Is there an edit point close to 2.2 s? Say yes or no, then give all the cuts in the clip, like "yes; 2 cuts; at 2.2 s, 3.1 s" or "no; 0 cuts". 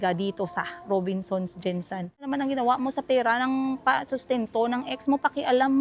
yes; 1 cut; at 2.2 s